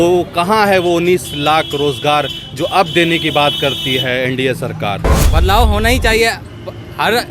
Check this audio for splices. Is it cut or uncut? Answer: cut